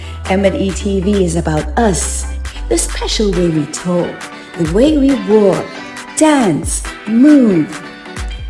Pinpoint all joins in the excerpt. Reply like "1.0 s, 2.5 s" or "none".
none